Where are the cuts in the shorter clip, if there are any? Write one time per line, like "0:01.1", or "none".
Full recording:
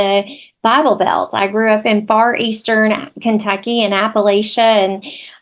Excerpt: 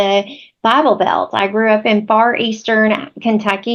none